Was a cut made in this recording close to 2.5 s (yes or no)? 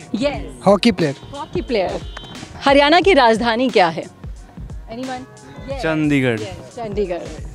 yes